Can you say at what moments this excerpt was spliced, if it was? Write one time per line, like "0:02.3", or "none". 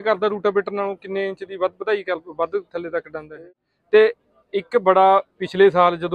0:03.3